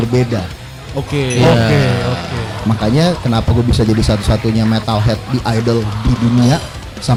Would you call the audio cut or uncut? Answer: uncut